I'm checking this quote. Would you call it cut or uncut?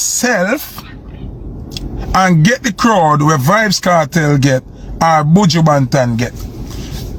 uncut